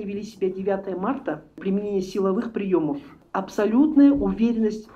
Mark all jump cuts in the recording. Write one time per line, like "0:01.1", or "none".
0:01.6
0:03.2